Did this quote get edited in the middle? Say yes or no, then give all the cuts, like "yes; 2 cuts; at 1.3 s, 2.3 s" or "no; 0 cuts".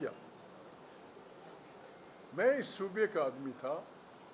no; 0 cuts